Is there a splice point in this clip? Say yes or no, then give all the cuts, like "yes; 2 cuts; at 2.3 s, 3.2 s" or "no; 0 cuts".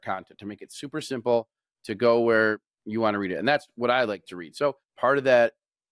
yes; 1 cut; at 4.9 s